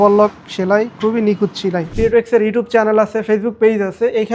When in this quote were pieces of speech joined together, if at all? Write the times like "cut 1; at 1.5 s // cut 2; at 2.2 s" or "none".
cut 1; at 1.9 s